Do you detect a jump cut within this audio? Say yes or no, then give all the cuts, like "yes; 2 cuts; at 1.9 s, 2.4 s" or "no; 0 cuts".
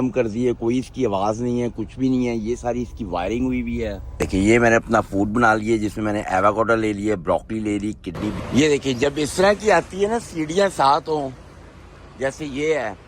yes; 2 cuts; at 4.0 s, 8.4 s